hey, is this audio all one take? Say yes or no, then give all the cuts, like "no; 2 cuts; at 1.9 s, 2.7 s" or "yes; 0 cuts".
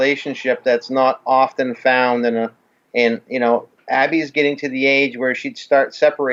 yes; 0 cuts